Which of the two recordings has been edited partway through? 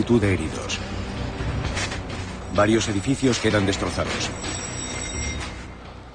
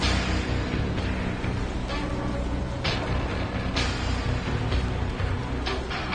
second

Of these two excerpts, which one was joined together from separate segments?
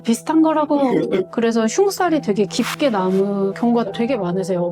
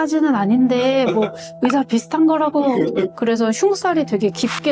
first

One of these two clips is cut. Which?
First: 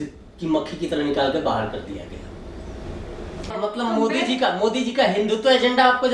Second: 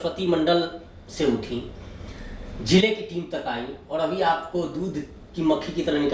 first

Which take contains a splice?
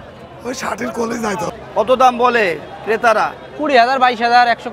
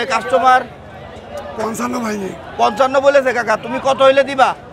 first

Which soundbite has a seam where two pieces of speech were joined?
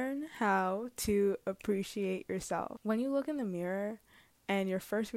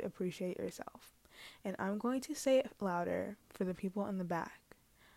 first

